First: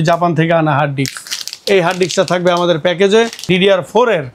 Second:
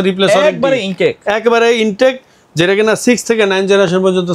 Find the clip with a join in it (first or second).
first